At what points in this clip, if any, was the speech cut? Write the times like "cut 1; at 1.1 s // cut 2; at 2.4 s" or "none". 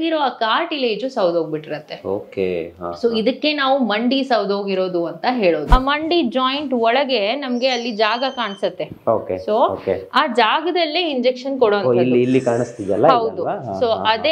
cut 1; at 5.7 s